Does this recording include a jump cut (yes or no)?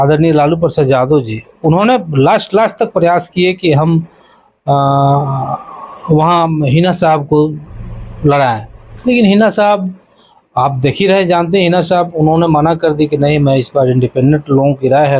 no